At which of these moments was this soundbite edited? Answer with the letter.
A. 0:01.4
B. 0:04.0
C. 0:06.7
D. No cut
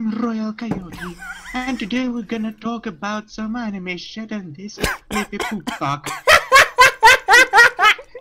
D